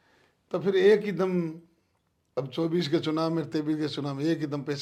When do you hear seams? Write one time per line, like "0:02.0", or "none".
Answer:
none